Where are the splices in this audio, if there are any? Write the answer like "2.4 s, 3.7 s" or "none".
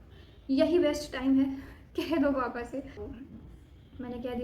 3.0 s